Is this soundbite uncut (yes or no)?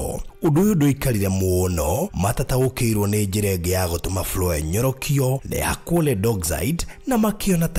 yes